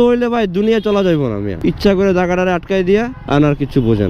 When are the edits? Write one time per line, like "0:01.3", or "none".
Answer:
0:01.5
0:03.2